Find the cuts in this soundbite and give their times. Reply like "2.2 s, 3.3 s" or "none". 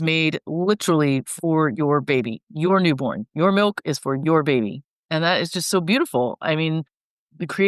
none